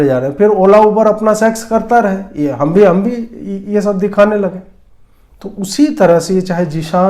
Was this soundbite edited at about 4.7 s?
yes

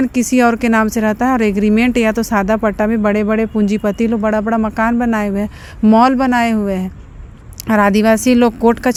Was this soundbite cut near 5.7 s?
no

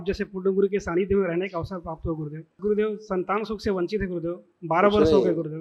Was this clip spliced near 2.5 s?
yes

